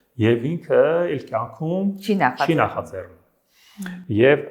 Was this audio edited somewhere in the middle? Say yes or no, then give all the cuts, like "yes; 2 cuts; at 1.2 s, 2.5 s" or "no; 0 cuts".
no; 0 cuts